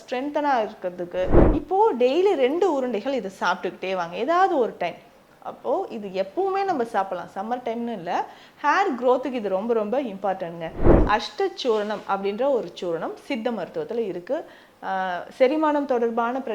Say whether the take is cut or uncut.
cut